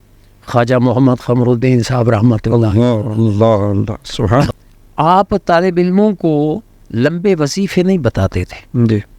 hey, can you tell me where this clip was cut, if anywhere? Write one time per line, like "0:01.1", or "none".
0:04.6